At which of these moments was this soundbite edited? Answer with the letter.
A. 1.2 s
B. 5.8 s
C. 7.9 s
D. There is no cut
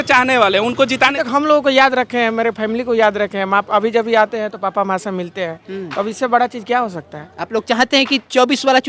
A